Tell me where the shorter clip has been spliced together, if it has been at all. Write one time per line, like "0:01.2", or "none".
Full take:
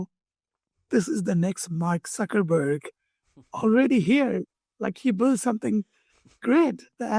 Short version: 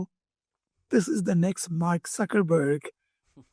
none